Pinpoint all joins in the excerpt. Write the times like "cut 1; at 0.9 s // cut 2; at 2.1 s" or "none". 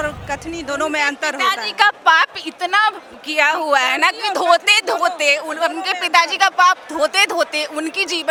none